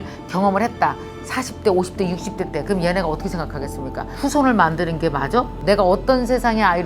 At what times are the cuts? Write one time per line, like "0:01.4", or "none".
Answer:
0:04.1
0:05.6

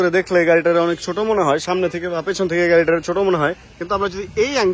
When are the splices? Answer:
0:03.7

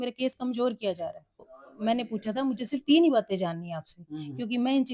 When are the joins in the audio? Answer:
0:01.6

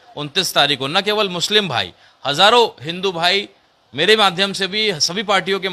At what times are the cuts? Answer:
none

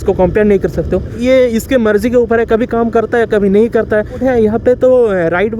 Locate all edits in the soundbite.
0:01.2
0:04.2

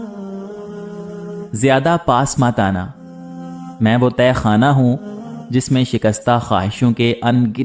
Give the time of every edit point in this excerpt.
0:01.5

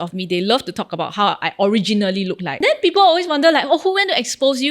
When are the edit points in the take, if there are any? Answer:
0:02.5

